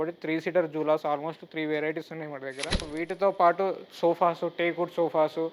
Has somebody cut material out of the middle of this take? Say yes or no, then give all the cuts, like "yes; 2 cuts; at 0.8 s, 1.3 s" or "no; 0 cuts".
yes; 1 cut; at 2.9 s